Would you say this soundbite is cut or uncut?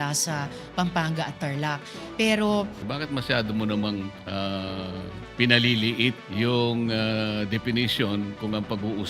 cut